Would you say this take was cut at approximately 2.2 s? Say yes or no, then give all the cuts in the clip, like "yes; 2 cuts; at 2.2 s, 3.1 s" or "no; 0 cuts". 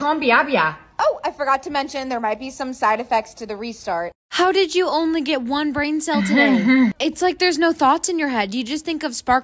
no; 1 cut; at 4.2 s